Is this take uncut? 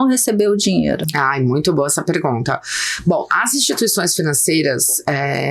yes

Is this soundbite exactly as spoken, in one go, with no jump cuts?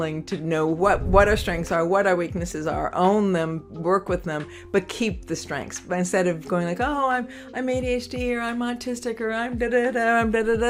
yes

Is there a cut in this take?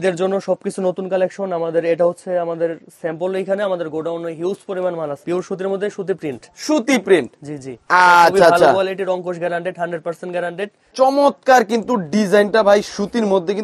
yes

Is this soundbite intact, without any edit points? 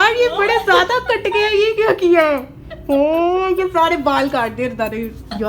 yes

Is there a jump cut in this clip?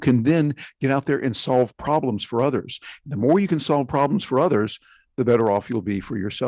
no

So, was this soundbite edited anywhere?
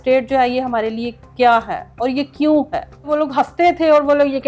yes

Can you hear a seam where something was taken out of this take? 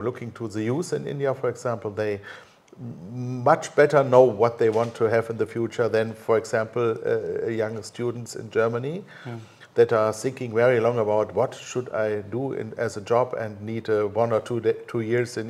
no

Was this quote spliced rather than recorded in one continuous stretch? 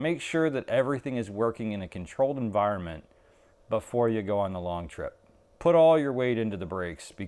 no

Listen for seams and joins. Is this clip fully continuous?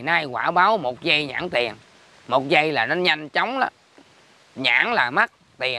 yes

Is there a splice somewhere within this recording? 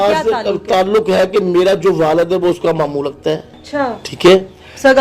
yes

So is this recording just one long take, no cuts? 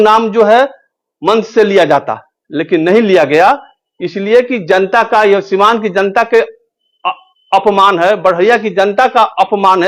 yes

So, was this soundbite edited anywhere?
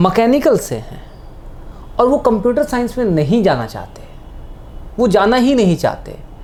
no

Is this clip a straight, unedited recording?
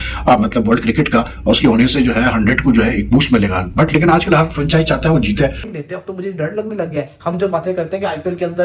no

